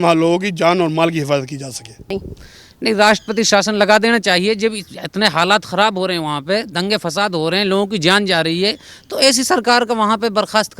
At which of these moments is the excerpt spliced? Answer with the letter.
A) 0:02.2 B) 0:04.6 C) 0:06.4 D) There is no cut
A